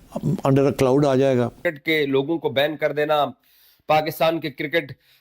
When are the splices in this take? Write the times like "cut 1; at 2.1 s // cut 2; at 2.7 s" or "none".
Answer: cut 1; at 1.6 s